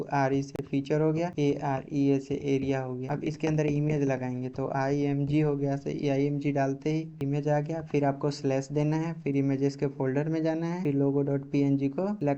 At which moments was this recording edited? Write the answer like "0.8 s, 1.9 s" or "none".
1.3 s, 3.0 s